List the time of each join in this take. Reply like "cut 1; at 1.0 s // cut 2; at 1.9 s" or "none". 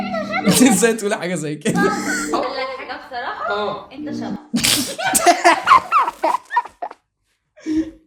none